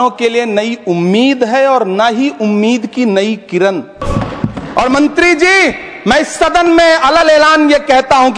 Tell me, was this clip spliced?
yes; 1 cut; at 4.0 s

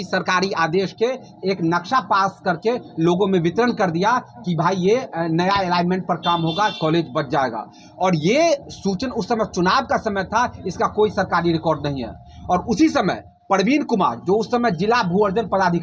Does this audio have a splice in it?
no; 0 cuts

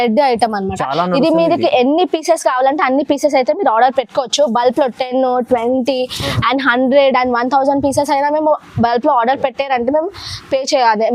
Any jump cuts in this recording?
no; 0 cuts

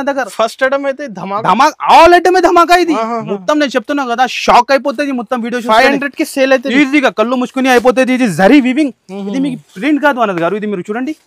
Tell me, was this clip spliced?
no; 0 cuts

